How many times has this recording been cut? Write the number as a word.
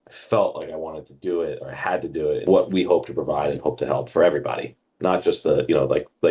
one